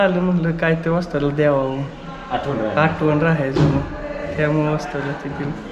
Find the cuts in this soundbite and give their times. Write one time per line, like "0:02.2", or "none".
none